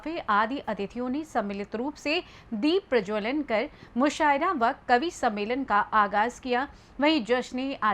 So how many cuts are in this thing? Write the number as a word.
one